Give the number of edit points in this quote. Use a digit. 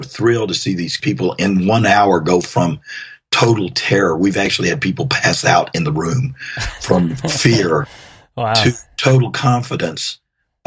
1